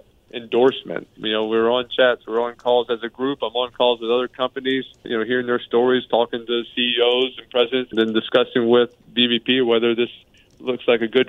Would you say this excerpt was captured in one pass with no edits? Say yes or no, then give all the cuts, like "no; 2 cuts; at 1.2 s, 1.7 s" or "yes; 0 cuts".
no; 3 cuts; at 1.1 s, 5.1 s, 7.9 s